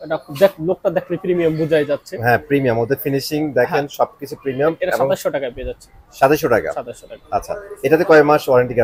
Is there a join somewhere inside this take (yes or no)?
no